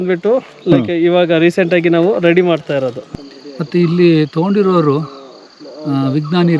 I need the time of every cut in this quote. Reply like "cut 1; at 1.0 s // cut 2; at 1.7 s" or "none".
cut 1; at 3.0 s